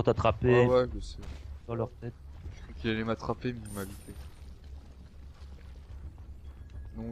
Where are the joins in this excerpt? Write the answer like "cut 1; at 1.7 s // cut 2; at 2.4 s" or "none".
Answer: cut 1; at 2.2 s